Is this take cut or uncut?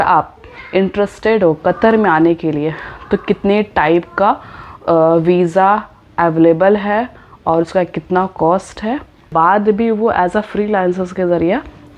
cut